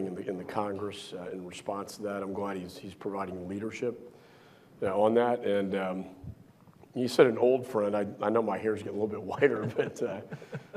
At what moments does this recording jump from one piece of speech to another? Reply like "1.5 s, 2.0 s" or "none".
none